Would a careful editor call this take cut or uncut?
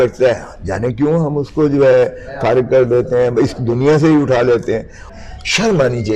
cut